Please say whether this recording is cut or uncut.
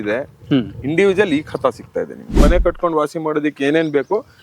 cut